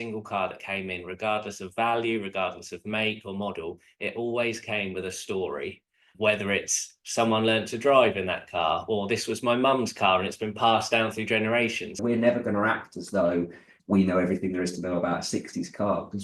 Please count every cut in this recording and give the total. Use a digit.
1